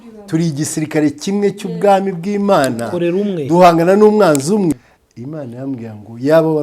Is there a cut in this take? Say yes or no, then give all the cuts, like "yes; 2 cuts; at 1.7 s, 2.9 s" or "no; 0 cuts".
yes; 1 cut; at 4.7 s